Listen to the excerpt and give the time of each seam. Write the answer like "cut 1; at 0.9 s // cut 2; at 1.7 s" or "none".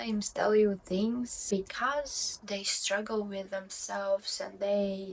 cut 1; at 1.5 s